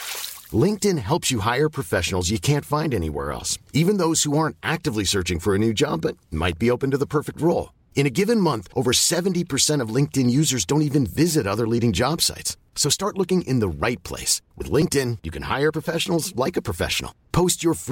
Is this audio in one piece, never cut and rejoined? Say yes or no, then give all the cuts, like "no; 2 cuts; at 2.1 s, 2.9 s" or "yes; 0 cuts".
yes; 0 cuts